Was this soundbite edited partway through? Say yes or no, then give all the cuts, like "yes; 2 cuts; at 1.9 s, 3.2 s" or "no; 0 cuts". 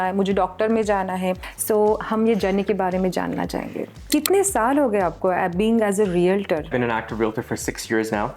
yes; 3 cuts; at 1.5 s, 4.1 s, 6.7 s